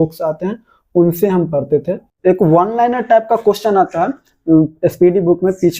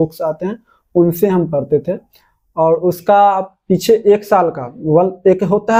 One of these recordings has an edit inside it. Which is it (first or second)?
first